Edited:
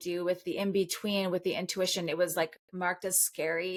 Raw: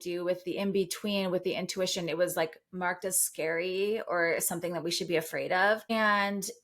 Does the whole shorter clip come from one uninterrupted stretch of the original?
yes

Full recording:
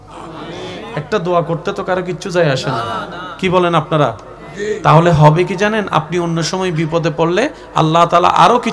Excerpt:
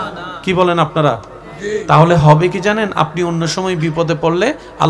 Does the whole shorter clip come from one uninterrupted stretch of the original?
yes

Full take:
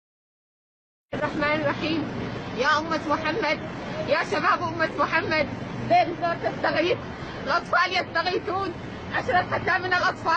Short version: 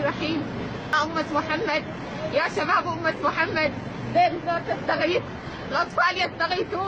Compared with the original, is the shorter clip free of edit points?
no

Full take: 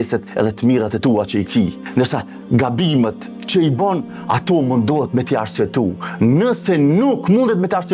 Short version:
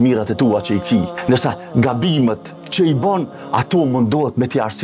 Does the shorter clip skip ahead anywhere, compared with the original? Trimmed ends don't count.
yes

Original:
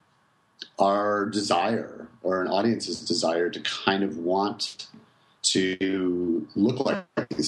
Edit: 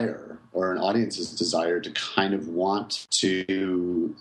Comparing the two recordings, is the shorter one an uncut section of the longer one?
no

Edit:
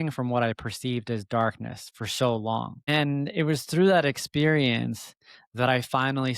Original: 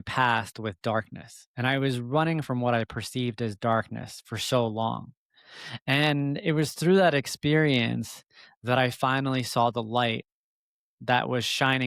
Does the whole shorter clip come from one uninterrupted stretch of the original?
no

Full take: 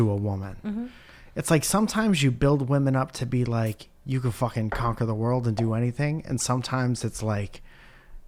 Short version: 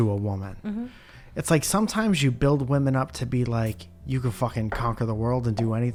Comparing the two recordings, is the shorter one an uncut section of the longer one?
yes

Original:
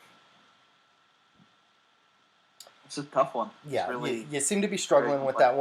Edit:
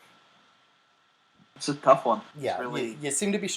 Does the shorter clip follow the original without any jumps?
no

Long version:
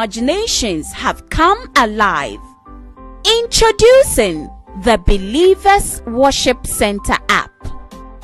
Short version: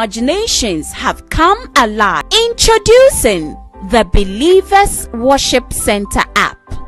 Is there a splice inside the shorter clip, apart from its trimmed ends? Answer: yes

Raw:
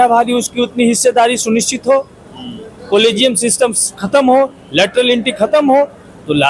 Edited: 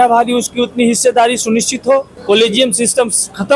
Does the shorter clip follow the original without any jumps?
no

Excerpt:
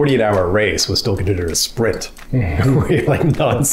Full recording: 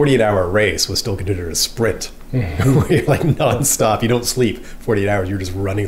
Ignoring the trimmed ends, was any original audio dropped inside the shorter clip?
no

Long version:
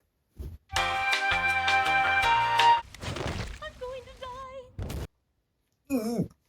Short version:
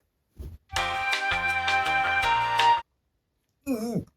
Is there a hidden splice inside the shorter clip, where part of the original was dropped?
yes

